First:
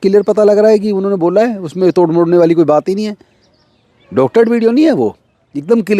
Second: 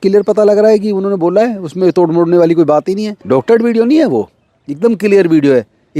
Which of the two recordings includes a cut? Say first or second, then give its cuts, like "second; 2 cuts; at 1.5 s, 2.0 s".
second; 1 cut; at 3.1 s